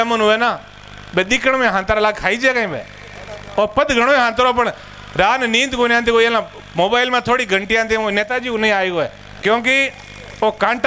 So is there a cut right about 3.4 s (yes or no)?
no